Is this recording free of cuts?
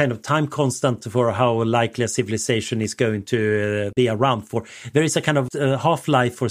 no; 2 cuts; at 3.9 s, 5.5 s

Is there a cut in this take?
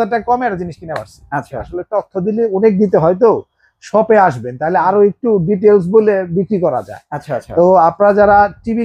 yes; 1 cut; at 1.7 s

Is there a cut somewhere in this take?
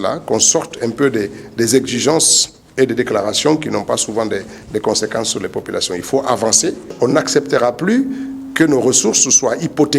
yes; 1 cut; at 6.9 s

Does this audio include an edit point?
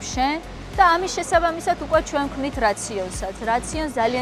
no; 0 cuts

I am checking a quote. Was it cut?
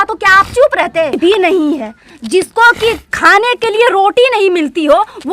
yes; 1 cut; at 1.1 s

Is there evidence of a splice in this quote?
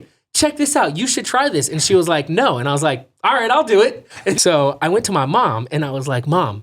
yes; 1 cut; at 4.4 s

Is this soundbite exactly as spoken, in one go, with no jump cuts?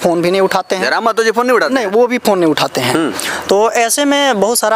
yes; 0 cuts

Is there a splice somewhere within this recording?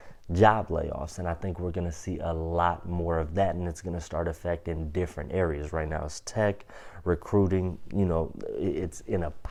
no; 0 cuts

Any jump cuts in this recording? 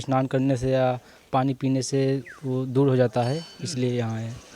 no; 0 cuts

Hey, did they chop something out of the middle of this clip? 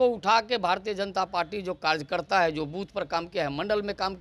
no; 0 cuts

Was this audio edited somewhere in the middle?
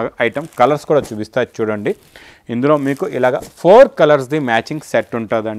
no; 0 cuts

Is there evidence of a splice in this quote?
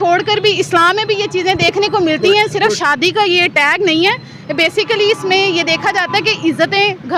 no; 0 cuts

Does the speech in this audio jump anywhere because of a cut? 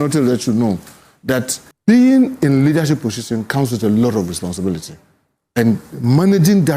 yes; 1 cut; at 1.6 s

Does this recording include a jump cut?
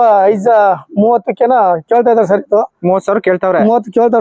no; 0 cuts

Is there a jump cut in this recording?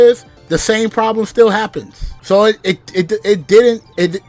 no; 0 cuts

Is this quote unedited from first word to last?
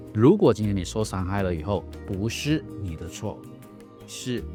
yes; 0 cuts

